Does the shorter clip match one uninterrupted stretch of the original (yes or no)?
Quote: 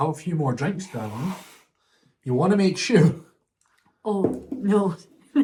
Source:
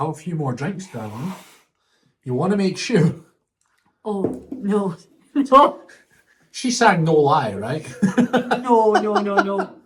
yes